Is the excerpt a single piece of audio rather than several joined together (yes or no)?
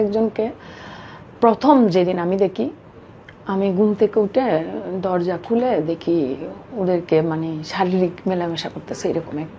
yes